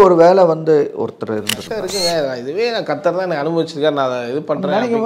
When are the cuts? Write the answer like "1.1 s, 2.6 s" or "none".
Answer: 1.8 s